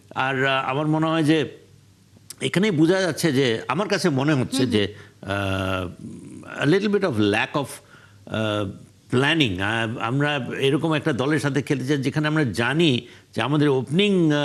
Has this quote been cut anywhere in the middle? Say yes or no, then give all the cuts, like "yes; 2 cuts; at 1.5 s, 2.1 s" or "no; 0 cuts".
no; 0 cuts